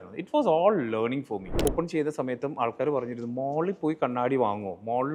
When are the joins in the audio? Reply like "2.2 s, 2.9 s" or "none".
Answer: 1.7 s